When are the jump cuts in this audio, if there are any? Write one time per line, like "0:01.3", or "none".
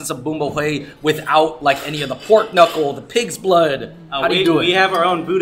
none